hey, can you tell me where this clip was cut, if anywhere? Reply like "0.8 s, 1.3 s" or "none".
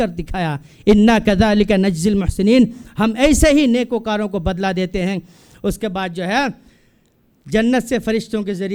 none